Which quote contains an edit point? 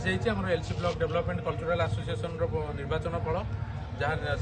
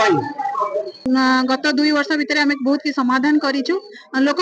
second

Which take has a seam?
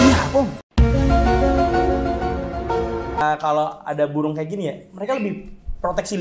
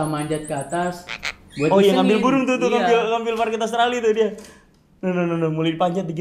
first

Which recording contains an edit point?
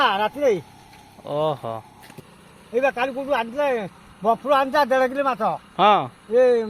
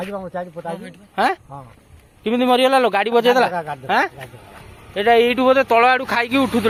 first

